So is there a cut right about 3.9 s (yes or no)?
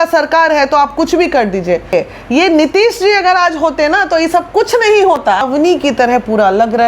no